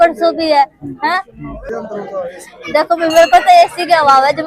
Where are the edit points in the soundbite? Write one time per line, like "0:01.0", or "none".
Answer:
0:01.6